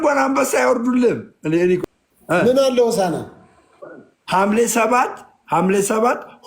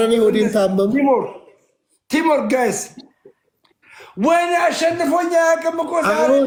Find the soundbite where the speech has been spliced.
first; 1 cut; at 1.8 s

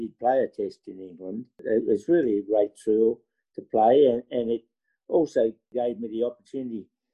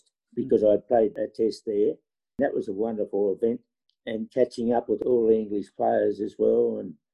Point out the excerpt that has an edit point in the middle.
second; 3 cuts; at 1.3 s, 2.4 s, 5.0 s

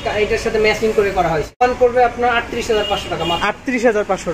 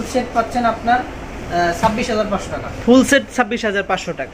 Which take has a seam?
first; 1 cut; at 1.6 s

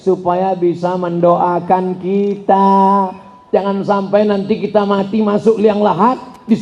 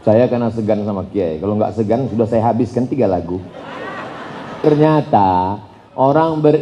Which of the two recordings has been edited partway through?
second; 1 cut; at 4.6 s

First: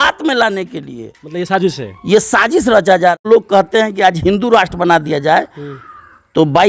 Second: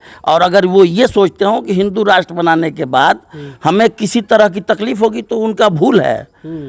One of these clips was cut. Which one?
first; 1 cut; at 3.3 s

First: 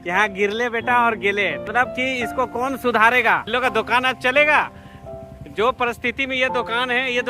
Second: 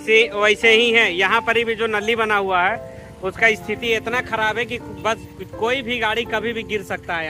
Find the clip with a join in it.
first; 2 cuts; at 1.7 s, 3.5 s

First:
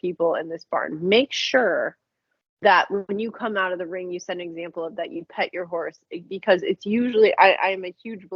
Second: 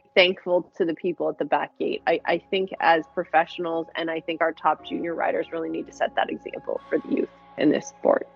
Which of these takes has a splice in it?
second; 1 cut; at 7.4 s

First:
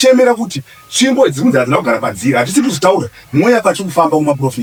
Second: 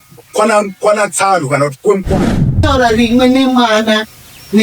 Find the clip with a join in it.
second; 1 cut; at 2.6 s

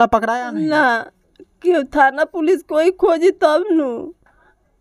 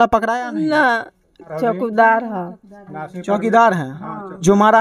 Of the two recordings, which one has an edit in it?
second; 1 cut; at 1.5 s

